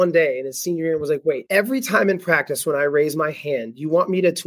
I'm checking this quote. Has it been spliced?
yes; 1 cut; at 1.4 s

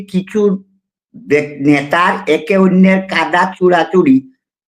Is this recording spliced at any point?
no; 0 cuts

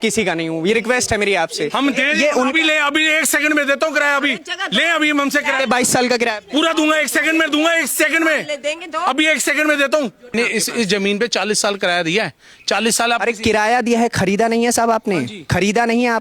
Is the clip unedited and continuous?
no; 2 cuts; at 1.7 s, 10.3 s

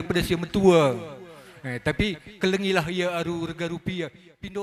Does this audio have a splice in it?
no; 0 cuts

